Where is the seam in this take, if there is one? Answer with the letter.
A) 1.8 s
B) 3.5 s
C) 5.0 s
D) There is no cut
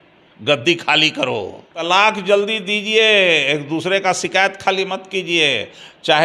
A